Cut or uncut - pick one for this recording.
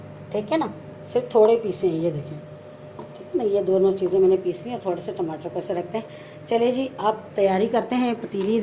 uncut